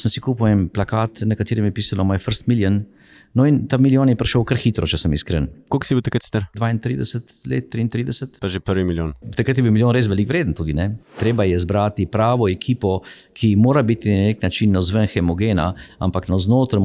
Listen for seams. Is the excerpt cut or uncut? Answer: cut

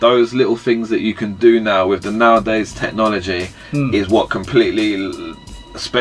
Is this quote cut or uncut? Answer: uncut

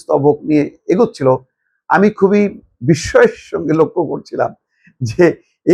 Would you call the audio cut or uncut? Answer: uncut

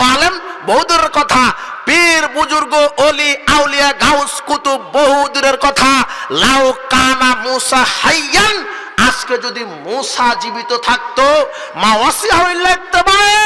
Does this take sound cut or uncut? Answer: uncut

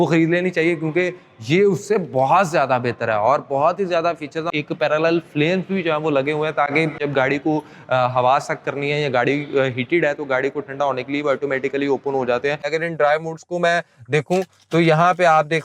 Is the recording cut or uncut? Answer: cut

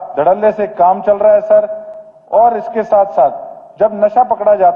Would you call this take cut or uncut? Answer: uncut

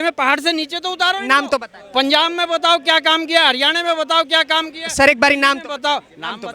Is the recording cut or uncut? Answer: uncut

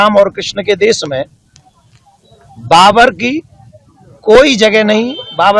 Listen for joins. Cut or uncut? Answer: uncut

